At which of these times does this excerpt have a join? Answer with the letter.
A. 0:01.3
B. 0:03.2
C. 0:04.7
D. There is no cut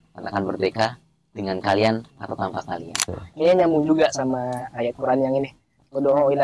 B